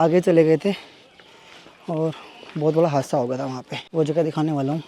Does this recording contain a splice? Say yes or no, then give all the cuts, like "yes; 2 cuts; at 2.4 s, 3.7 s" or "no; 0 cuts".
no; 0 cuts